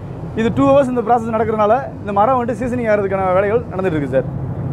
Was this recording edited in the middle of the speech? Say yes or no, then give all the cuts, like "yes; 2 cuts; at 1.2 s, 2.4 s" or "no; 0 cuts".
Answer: no; 0 cuts